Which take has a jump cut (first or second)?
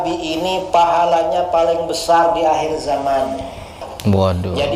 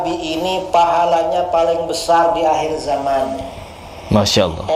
first